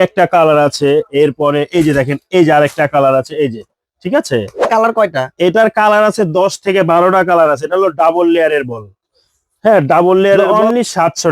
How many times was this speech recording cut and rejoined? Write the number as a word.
two